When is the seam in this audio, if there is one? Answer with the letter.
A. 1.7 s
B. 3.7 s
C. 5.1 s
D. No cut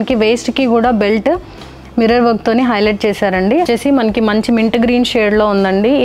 B